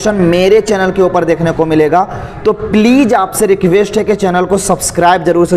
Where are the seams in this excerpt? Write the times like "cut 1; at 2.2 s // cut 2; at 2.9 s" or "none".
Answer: none